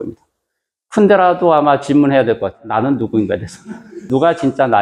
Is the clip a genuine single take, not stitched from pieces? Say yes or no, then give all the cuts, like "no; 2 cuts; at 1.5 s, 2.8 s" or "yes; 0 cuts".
no; 2 cuts; at 2.6 s, 4.1 s